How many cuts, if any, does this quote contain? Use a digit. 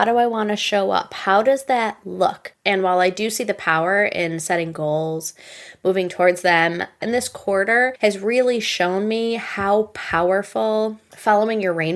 4